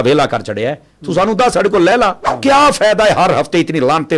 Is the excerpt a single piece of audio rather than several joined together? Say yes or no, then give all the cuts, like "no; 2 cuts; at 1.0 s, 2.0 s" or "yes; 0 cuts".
no; 1 cut; at 2.3 s